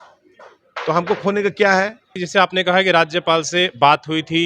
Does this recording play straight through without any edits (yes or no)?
no